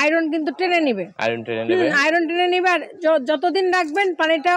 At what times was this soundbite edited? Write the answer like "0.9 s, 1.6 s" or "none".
none